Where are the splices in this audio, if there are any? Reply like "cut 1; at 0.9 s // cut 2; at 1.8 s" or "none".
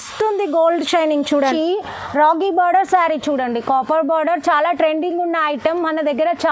cut 1; at 1.5 s